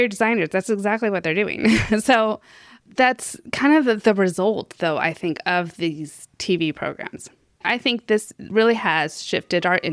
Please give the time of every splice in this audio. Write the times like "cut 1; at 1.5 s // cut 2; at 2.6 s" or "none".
cut 1; at 7.5 s